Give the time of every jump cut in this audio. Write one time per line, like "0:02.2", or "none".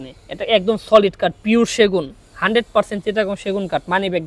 none